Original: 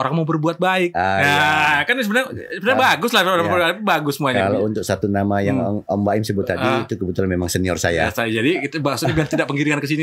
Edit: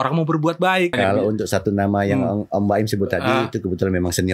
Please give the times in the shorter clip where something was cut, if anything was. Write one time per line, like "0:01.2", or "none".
0:00.9